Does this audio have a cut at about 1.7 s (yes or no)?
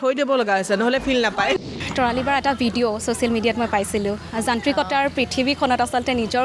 yes